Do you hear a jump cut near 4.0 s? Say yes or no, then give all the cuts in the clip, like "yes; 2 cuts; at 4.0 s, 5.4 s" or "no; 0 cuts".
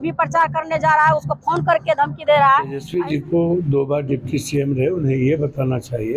no; 1 cut; at 2.8 s